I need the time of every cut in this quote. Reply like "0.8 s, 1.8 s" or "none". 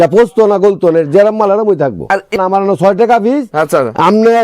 2.3 s